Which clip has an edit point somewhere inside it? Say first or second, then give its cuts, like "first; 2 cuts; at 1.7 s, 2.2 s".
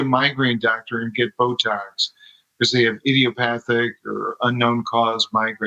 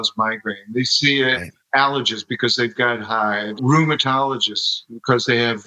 second; 2 cuts; at 1.5 s, 3.5 s